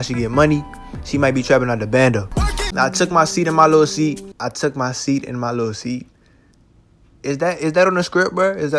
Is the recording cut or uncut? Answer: cut